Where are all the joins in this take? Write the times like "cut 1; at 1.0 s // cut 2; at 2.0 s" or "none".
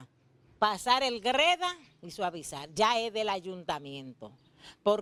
none

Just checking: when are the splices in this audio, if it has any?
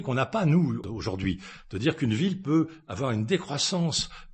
cut 1; at 0.9 s

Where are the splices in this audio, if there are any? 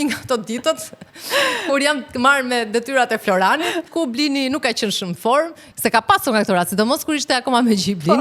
cut 1; at 3.9 s // cut 2; at 5.6 s

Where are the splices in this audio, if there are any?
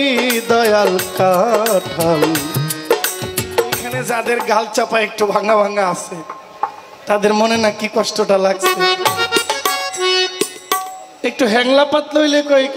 cut 1; at 4.0 s // cut 2; at 11.0 s

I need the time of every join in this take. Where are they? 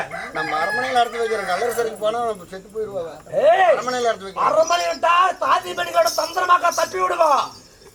none

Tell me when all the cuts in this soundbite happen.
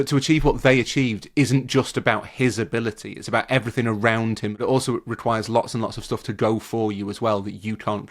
cut 1; at 4.6 s

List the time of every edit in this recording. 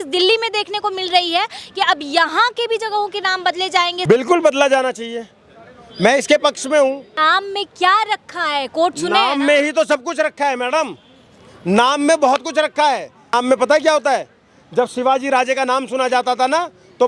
cut 1; at 4.0 s // cut 2; at 7.1 s // cut 3; at 13.3 s

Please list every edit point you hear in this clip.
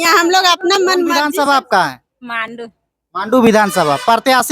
cut 1; at 1.2 s

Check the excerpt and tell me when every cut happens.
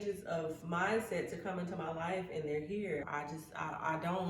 cut 1; at 3.0 s

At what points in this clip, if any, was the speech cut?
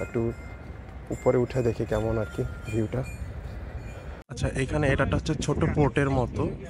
cut 1; at 4.4 s

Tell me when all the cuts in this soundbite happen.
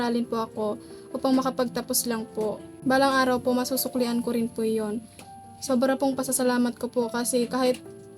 cut 1; at 2.7 s

